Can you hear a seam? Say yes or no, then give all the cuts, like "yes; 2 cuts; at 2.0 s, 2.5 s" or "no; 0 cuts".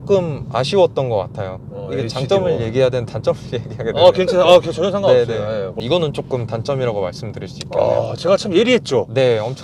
yes; 1 cut; at 5.8 s